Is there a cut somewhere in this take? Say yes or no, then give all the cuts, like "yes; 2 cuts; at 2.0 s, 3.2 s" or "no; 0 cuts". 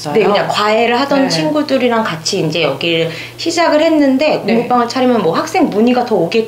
no; 0 cuts